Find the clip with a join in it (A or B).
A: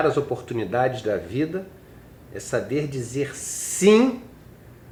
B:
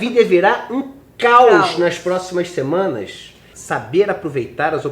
B